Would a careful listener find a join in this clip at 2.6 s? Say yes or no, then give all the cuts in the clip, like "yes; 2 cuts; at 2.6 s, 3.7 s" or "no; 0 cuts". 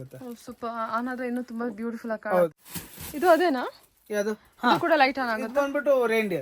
yes; 1 cut; at 2.6 s